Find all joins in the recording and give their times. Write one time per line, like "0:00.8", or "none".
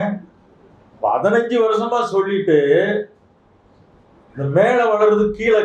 none